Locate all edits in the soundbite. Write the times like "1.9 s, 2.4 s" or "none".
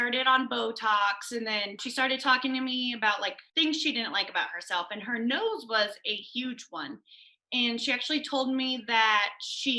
1.8 s, 3.4 s